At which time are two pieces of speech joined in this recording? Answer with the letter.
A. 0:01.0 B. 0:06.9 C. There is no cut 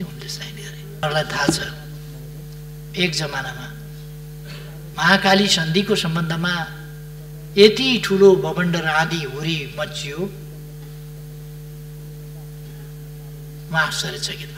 A